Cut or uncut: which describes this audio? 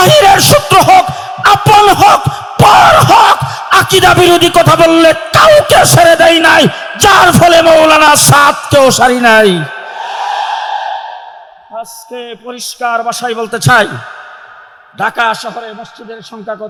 uncut